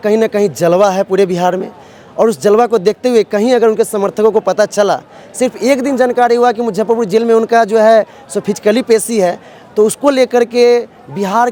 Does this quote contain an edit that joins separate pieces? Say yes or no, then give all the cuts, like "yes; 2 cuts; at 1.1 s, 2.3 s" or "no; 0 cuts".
no; 0 cuts